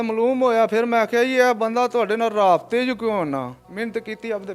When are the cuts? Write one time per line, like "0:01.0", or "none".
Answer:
0:03.6